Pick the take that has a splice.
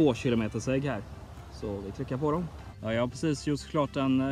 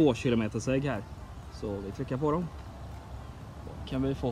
first; 1 cut; at 2.6 s

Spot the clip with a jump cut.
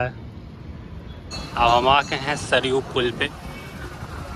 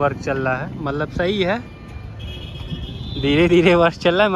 first; 1 cut; at 1.3 s

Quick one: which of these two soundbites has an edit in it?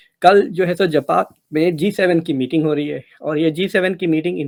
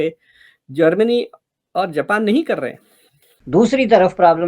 second; 1 cut; at 3.2 s

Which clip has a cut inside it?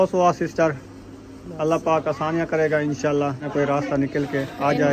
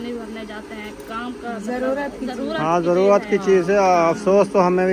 first; 1 cut; at 3.5 s

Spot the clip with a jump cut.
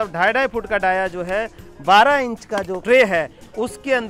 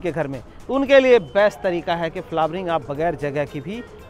first; 1 cut; at 2.8 s

